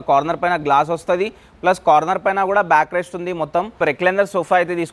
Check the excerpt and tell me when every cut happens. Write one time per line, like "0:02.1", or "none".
0:03.8